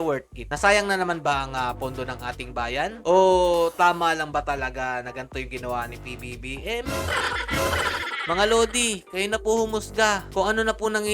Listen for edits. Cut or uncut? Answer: uncut